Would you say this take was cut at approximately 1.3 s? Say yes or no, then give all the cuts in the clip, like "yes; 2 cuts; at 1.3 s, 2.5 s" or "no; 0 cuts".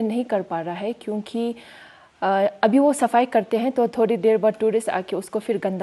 no; 0 cuts